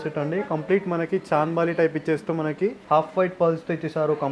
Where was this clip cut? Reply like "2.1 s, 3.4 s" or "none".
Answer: 2.8 s